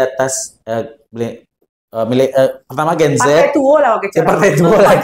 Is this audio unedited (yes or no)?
yes